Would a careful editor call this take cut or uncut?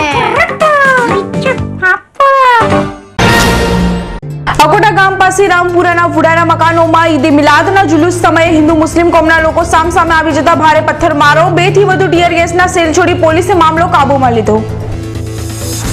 cut